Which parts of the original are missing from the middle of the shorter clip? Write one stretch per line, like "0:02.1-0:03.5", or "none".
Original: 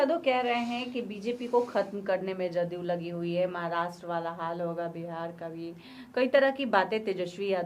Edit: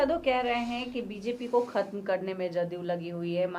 none